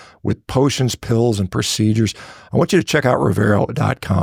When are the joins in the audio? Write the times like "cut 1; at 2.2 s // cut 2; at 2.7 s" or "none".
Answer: none